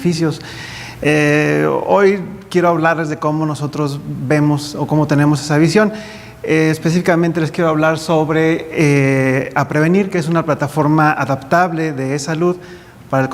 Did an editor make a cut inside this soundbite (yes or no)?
no